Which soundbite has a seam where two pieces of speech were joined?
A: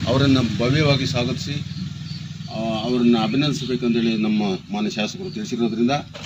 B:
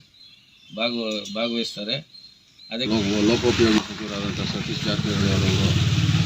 B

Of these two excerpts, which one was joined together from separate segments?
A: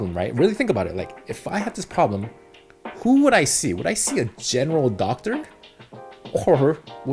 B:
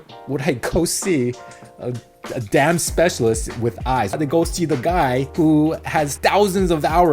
B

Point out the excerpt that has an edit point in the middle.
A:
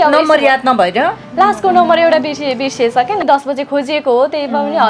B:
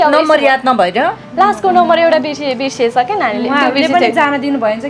A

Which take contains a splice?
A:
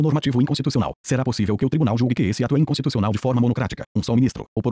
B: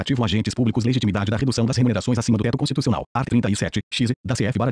A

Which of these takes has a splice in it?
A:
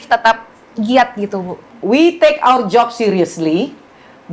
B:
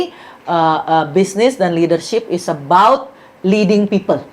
A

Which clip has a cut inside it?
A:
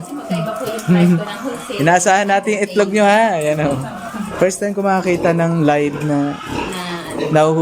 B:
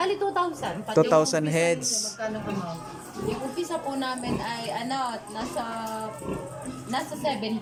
A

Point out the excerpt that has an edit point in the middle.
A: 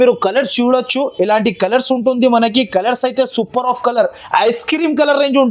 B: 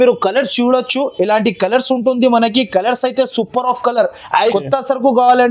B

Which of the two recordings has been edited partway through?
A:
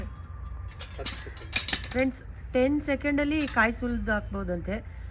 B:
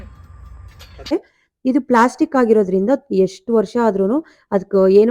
B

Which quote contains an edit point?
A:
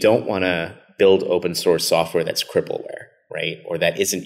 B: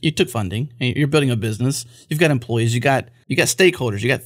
B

